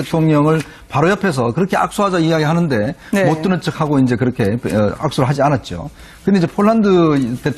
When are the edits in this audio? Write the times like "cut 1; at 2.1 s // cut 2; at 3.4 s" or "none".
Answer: cut 1; at 3.0 s